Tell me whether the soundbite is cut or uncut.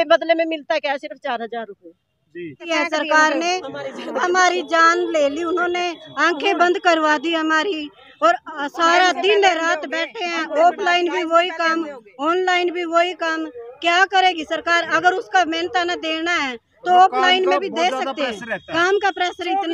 cut